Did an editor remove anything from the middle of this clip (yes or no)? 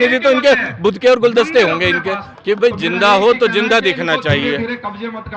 yes